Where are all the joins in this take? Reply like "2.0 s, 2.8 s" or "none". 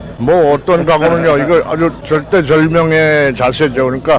none